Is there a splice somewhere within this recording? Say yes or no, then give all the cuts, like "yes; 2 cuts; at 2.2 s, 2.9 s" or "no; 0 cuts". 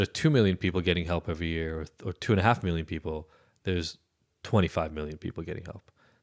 no; 0 cuts